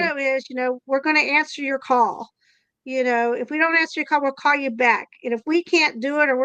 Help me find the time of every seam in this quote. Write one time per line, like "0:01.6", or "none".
none

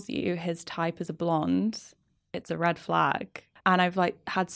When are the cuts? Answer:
0:03.5

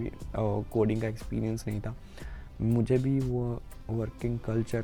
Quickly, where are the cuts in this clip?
none

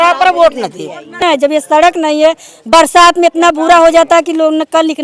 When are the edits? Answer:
none

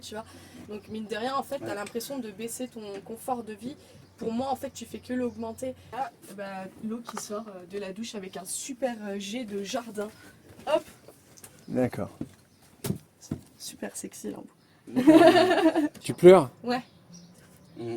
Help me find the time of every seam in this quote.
0:05.9
0:15.9

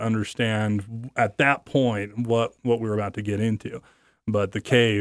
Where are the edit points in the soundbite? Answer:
none

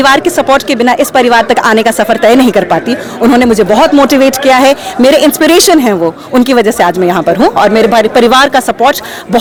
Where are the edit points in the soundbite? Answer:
none

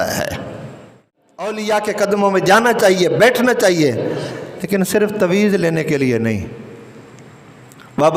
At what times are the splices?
0:01.5

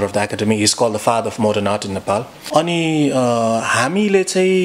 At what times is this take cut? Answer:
0:02.4

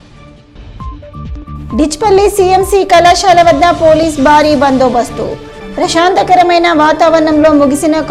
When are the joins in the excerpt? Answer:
0:01.0

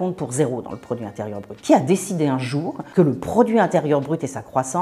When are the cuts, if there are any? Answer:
0:01.5
0:02.7

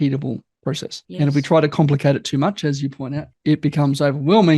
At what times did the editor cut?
0:03.2

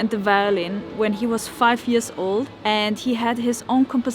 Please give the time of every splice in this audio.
0:02.5

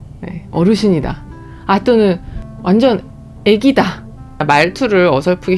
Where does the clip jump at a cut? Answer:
0:02.4
0:04.4

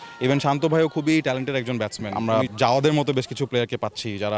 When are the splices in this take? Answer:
0:02.2

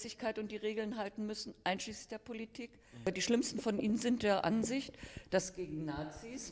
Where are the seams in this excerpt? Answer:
0:03.1

